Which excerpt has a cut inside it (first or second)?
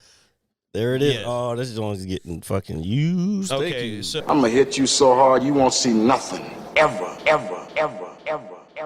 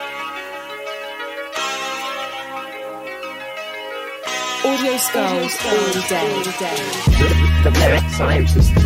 first